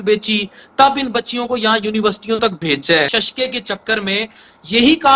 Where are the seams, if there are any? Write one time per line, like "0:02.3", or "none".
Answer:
0:03.1

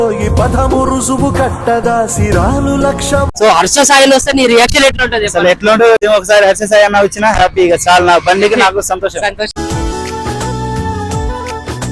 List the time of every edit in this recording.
0:03.3
0:06.0
0:09.5

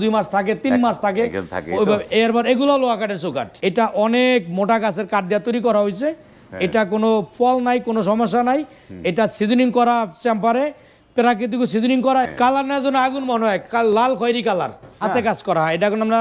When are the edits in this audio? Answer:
0:03.4
0:12.2
0:15.0

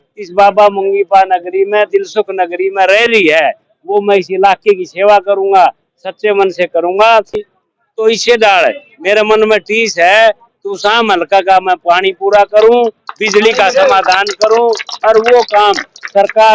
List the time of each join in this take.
0:07.5

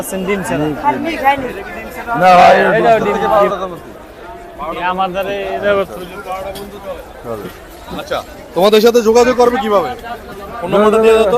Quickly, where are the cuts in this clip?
0:03.2

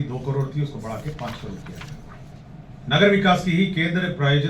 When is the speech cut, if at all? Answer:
0:02.3

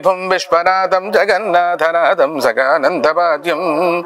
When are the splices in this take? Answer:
none

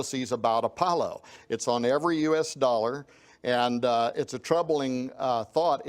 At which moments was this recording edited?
0:01.4

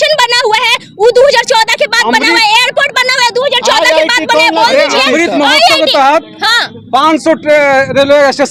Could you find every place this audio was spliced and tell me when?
none

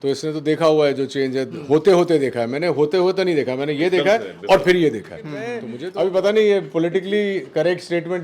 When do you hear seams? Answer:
0:05.8

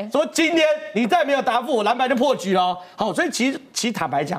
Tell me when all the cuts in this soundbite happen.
none

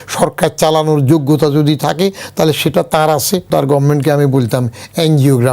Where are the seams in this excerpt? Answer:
0:03.5

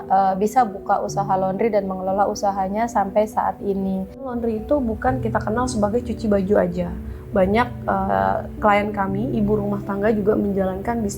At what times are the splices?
0:04.3

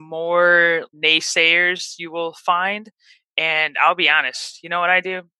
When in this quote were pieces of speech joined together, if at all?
0:00.9

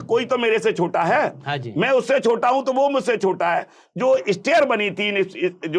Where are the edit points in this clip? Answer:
none

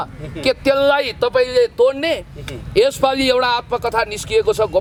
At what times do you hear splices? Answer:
none

